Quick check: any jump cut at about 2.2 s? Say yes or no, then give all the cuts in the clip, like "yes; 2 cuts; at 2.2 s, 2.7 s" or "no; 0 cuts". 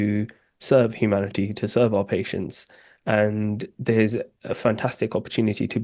no; 0 cuts